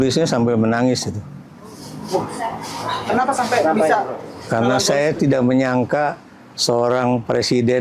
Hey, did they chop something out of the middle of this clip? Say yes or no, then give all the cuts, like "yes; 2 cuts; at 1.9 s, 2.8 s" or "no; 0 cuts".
no; 0 cuts